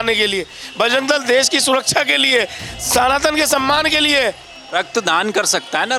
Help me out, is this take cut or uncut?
uncut